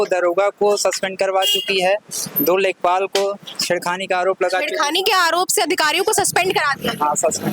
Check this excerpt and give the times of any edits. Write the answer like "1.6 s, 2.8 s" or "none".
none